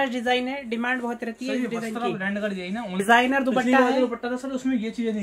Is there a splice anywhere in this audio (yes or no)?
yes